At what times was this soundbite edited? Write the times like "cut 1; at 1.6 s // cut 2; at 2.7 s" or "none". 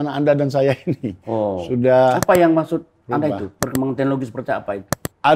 none